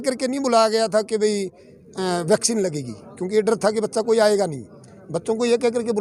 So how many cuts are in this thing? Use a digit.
0